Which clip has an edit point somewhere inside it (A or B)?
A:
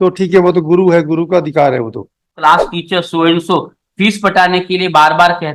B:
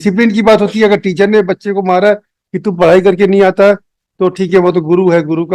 A